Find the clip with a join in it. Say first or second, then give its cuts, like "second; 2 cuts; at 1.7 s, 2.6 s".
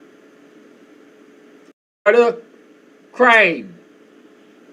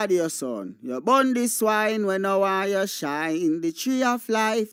first; 1 cut; at 1.9 s